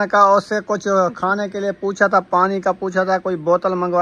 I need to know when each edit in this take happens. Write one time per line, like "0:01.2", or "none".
none